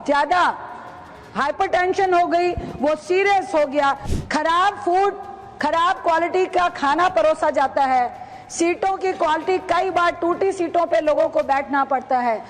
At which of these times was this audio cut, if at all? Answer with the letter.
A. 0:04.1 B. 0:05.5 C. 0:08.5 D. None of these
A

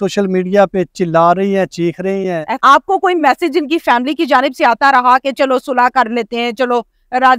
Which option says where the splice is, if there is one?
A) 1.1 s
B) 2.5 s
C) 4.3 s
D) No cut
B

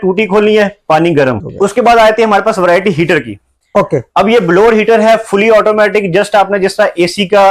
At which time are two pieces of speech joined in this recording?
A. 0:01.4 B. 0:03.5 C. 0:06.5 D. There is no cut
A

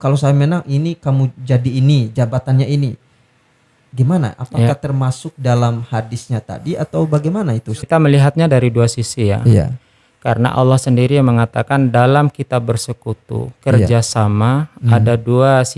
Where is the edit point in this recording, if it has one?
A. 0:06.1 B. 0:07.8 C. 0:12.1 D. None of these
B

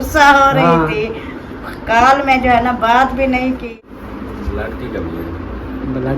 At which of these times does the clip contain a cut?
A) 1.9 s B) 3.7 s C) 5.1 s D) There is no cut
B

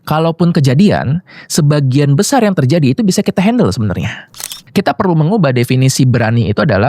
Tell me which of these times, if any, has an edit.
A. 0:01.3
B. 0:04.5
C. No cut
B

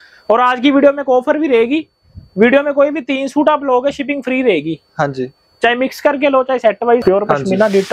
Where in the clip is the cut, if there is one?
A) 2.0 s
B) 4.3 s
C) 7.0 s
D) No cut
C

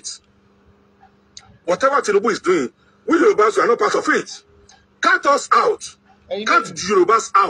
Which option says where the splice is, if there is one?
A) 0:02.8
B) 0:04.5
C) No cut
A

